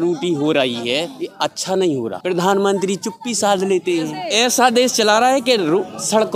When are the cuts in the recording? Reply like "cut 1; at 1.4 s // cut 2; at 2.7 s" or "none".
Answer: cut 1; at 1.2 s // cut 2; at 2.2 s // cut 3; at 4.2 s

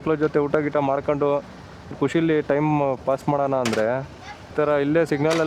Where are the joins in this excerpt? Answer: cut 1; at 1.9 s // cut 2; at 4.5 s

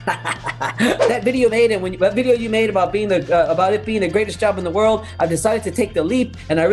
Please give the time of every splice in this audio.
cut 1; at 1.0 s

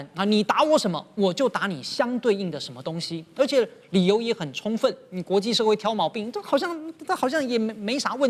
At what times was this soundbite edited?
none

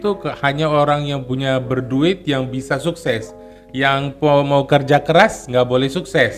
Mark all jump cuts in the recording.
none

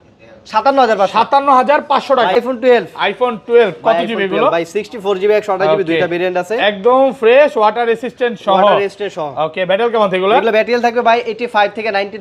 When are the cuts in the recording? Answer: cut 1; at 2.4 s

